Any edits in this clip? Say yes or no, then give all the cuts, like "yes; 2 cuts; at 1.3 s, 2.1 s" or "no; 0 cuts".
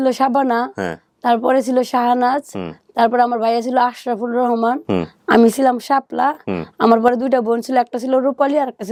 no; 0 cuts